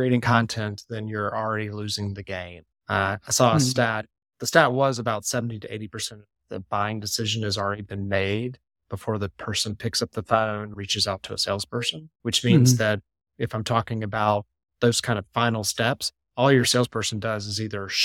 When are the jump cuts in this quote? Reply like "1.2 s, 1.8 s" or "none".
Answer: 10.7 s, 12.0 s